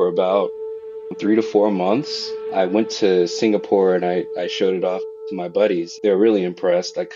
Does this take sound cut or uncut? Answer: cut